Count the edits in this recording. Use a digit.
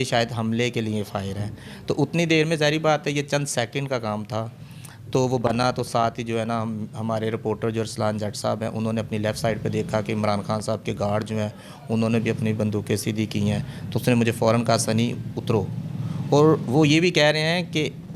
0